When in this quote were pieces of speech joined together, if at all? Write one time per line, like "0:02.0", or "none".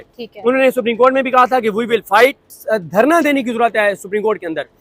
0:02.5